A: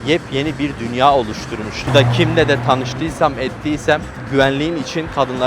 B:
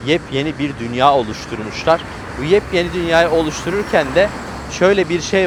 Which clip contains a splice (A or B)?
A